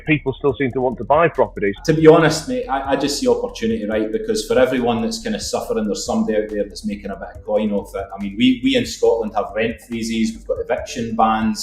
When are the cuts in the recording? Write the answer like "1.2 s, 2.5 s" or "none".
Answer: 1.8 s

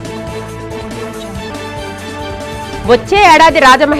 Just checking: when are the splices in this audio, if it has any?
1.1 s

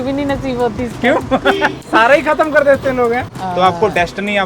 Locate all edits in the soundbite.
1.8 s, 3.3 s

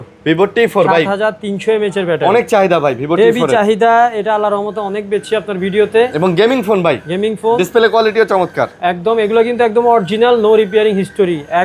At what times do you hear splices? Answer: none

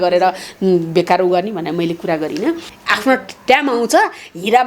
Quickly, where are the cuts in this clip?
2.7 s

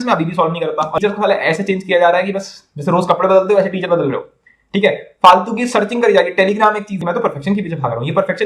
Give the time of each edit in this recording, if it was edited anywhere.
1.0 s, 6.9 s

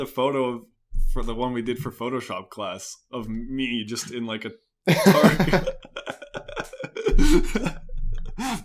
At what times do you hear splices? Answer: none

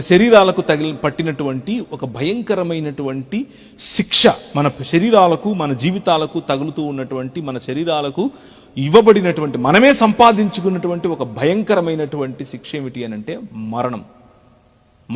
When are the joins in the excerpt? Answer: none

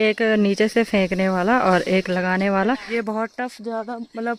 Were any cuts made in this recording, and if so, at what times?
2.8 s

